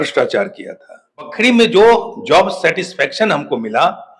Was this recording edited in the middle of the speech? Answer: yes; 1 cut; at 1.3 s

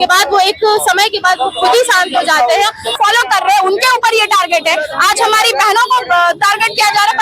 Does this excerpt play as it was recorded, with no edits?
no; 1 cut; at 2.9 s

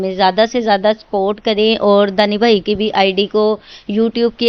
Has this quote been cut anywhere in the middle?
no; 0 cuts

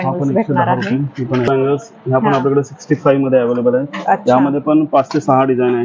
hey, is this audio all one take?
no; 1 cut; at 1.5 s

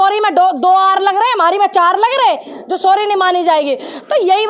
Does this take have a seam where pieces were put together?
no; 0 cuts

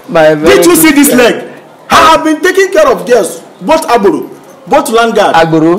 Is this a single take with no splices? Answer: yes; 0 cuts

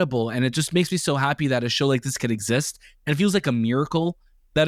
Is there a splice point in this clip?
no; 0 cuts

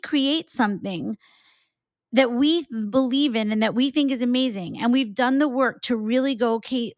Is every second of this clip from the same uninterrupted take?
yes; 0 cuts

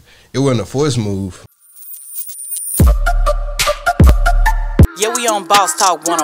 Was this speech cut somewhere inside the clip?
yes; 1 cut; at 1.7 s

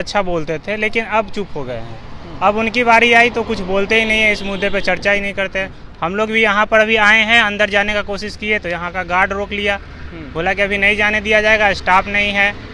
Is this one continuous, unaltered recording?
yes; 0 cuts

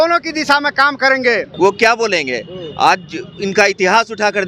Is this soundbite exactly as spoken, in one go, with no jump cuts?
no; 1 cut; at 1.5 s

